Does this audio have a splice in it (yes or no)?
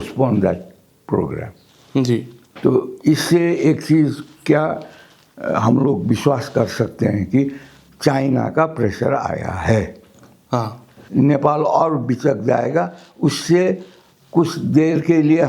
yes